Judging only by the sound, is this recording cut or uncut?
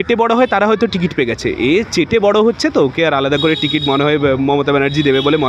uncut